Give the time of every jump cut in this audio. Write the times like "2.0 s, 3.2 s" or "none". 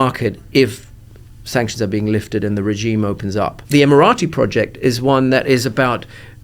3.6 s